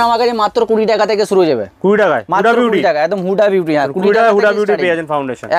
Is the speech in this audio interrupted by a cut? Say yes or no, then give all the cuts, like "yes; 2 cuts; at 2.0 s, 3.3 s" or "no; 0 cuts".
no; 0 cuts